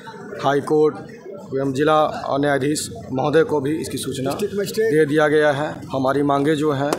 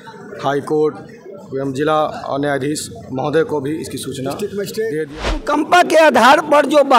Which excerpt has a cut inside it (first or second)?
second